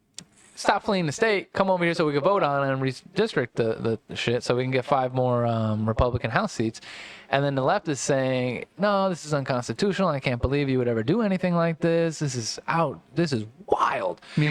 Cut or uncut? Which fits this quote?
uncut